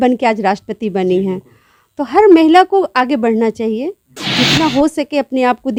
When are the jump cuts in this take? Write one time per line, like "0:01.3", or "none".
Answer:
none

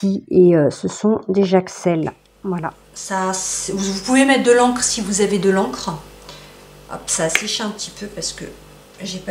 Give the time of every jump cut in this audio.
0:02.9

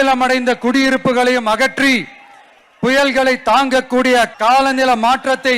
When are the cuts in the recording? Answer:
0:04.3

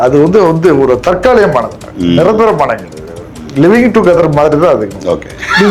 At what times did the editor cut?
none

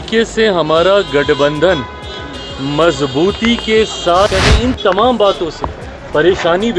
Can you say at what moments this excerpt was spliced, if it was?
0:04.4

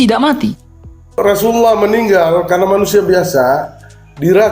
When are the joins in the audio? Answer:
0:01.2

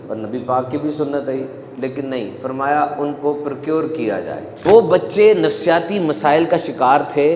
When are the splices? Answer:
0:04.6

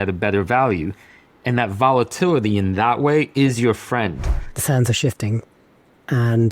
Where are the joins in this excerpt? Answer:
0:04.3

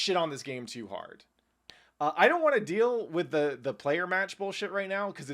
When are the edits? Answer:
0:01.6

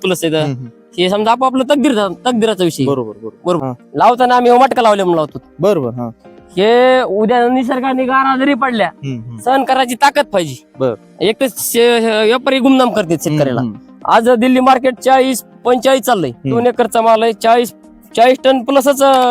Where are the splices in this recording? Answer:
0:03.6
0:11.1
0:16.6

